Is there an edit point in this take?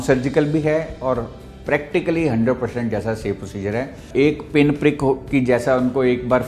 yes; 1 cut; at 4.0 s

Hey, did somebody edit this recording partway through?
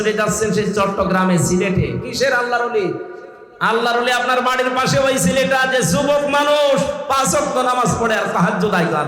no; 0 cuts

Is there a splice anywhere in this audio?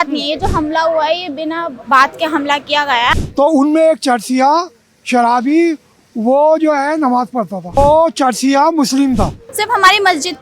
yes; 3 cuts; at 3.1 s, 7.8 s, 9.4 s

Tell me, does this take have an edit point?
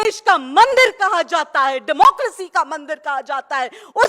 no; 0 cuts

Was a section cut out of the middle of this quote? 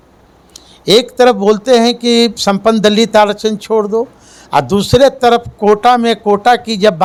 no; 0 cuts

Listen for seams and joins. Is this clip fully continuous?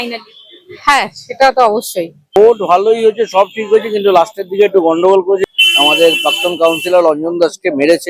no; 2 cuts; at 2.4 s, 5.4 s

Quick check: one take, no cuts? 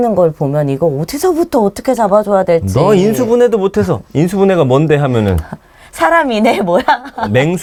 yes; 0 cuts

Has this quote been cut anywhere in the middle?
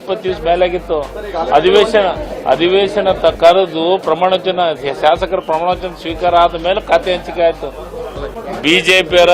yes; 1 cut; at 8.4 s

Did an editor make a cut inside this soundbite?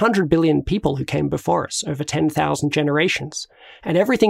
no; 0 cuts

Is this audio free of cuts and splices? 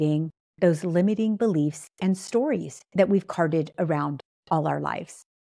yes; 0 cuts

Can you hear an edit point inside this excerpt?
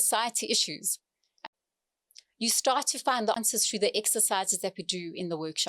yes; 2 cuts; at 1.3 s, 3.4 s

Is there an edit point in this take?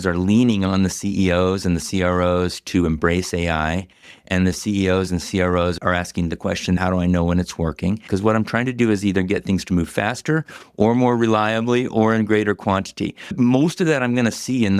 yes; 4 cuts; at 5.8 s, 6.8 s, 8.1 s, 13.4 s

